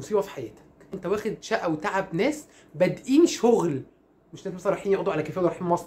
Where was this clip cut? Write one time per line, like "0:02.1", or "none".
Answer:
0:00.9